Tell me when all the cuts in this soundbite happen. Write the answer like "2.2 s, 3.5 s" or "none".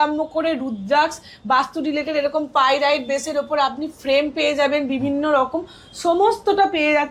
none